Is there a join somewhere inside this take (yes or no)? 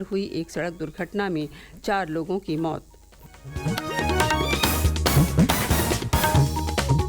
yes